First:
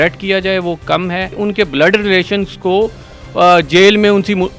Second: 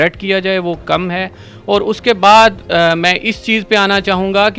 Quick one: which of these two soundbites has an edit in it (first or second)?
first